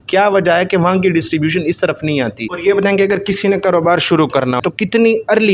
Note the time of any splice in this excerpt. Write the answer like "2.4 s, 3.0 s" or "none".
2.5 s, 4.6 s